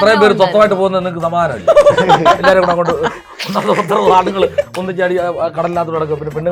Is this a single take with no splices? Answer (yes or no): yes